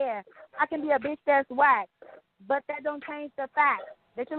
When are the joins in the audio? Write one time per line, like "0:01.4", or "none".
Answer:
none